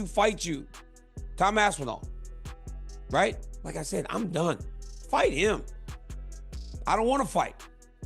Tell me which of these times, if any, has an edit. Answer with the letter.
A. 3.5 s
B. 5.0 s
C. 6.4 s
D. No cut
A